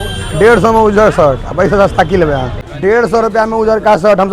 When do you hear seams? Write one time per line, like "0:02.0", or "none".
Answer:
0:02.6